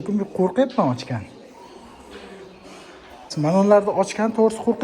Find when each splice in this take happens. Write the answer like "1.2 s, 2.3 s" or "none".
3.3 s